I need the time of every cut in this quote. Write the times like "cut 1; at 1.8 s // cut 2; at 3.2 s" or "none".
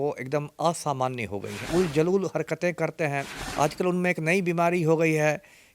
cut 1; at 1.7 s // cut 2; at 3.4 s